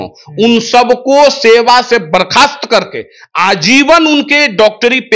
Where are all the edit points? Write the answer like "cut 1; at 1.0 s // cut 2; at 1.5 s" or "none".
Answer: none